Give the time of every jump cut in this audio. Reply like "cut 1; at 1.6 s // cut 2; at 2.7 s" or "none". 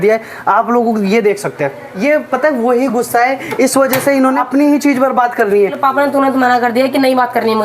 cut 1; at 2.1 s // cut 2; at 4.4 s // cut 3; at 5.8 s